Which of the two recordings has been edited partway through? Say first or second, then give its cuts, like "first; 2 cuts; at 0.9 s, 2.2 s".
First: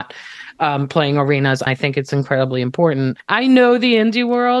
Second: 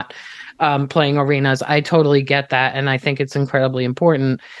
first; 2 cuts; at 1.6 s, 3.2 s